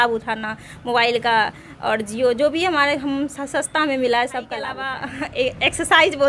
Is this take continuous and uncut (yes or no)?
no